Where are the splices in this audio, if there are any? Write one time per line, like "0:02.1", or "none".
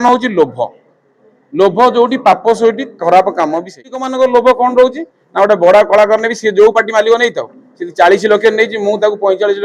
0:04.1